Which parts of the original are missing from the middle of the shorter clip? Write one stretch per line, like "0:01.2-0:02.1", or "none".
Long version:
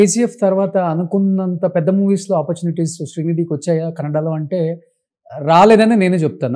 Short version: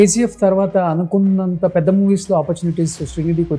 none